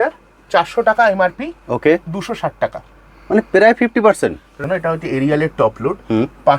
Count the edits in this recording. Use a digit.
1